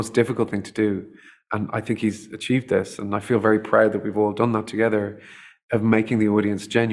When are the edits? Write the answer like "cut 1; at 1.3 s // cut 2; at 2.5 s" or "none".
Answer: none